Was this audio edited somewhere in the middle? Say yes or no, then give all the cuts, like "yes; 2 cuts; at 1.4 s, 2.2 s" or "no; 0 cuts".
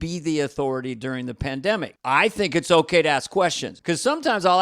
yes; 2 cuts; at 1.9 s, 3.7 s